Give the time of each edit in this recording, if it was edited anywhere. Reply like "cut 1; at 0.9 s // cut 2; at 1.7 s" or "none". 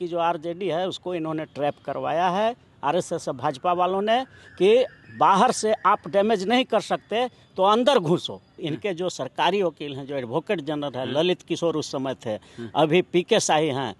cut 1; at 8.7 s